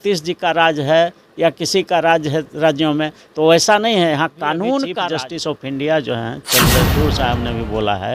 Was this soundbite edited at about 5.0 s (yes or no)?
yes